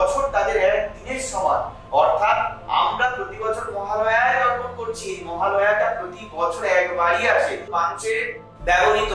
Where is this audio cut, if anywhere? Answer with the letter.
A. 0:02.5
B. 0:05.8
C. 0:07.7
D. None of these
C